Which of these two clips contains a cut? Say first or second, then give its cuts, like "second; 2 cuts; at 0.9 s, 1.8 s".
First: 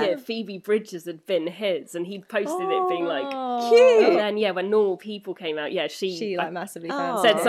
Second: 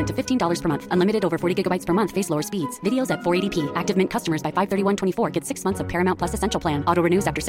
first; 1 cut; at 4.2 s